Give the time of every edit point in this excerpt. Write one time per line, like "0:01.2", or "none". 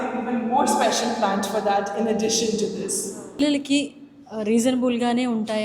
0:03.4